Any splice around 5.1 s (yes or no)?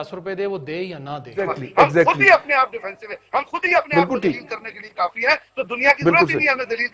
no